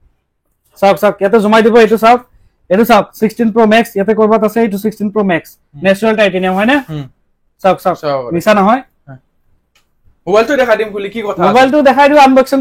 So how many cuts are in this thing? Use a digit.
0